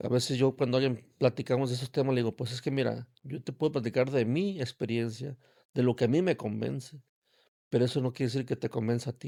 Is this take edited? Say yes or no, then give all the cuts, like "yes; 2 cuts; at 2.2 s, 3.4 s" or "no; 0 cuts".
no; 0 cuts